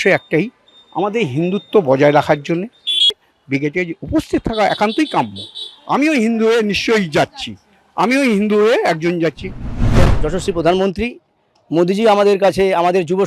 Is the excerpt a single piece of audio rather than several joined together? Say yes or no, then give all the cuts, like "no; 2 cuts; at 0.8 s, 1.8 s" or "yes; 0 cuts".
no; 2 cuts; at 3.2 s, 10.0 s